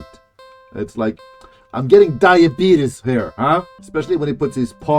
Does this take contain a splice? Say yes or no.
yes